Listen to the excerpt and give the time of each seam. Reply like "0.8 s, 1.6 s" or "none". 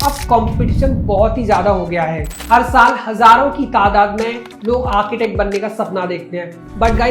none